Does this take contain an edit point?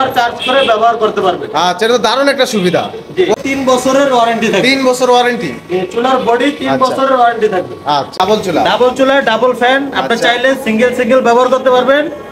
yes; 2 cuts; at 3.3 s, 8.2 s

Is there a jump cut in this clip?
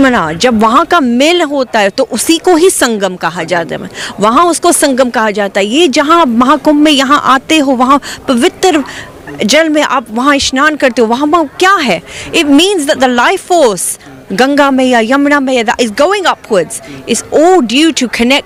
no; 0 cuts

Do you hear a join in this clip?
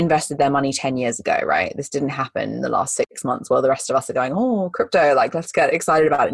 no; 0 cuts

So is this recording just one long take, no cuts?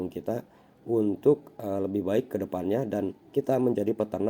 yes; 0 cuts

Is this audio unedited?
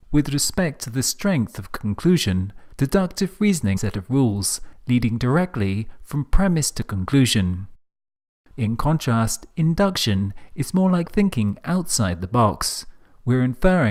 yes; 0 cuts

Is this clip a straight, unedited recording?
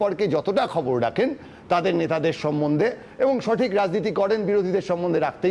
yes; 0 cuts

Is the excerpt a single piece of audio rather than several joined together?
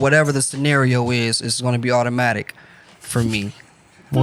yes; 0 cuts

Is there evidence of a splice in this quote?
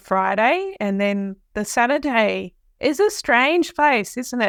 no; 0 cuts

